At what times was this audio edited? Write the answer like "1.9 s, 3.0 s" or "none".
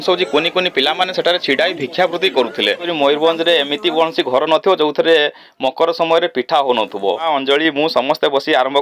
2.9 s, 7.2 s